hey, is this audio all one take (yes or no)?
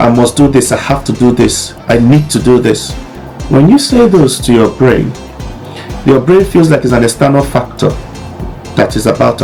yes